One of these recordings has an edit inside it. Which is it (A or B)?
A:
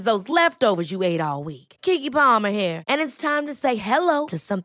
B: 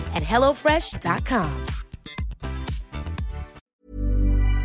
B